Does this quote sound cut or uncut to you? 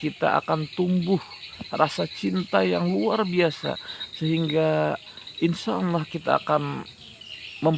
uncut